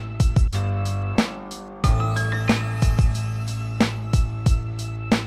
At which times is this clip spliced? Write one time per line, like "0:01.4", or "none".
0:01.7